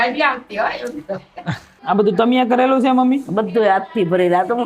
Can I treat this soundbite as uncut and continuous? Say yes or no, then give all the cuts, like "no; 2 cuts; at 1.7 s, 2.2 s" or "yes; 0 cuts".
no; 1 cut; at 1.7 s